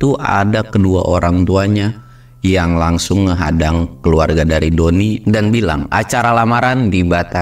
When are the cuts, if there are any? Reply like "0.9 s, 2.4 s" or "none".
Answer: 5.2 s

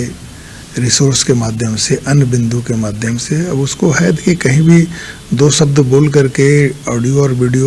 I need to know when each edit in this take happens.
none

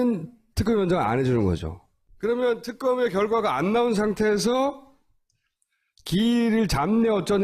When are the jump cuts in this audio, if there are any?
none

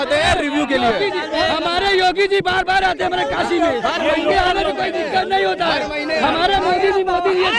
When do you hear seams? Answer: none

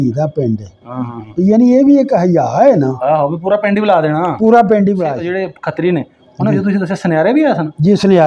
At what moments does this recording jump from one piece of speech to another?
5.2 s

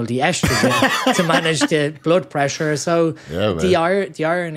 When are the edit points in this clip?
none

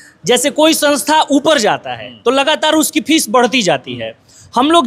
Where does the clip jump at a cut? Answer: none

